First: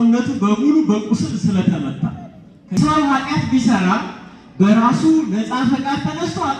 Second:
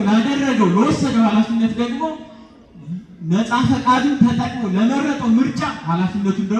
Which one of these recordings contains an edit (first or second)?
first